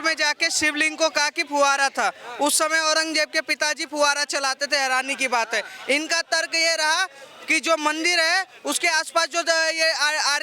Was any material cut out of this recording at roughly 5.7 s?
no; 0 cuts

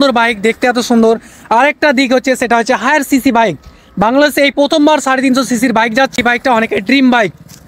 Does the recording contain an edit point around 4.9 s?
no; 1 cut; at 6.2 s

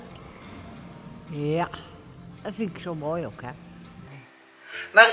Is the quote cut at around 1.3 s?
no; 1 cut; at 4.2 s

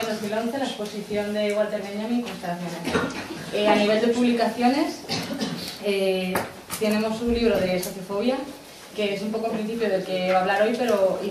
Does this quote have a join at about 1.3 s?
yes; 1 cut; at 1.3 s

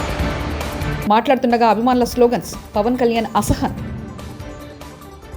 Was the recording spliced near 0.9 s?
yes; 1 cut; at 0.9 s

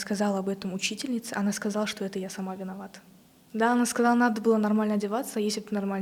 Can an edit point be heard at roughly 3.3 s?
no; 0 cuts

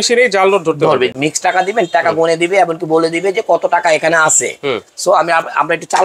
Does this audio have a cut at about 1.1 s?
yes; 1 cut; at 1.1 s

